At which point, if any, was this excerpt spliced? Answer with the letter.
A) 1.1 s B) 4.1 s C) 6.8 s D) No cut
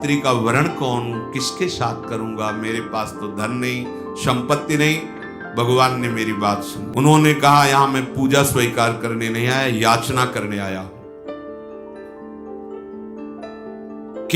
C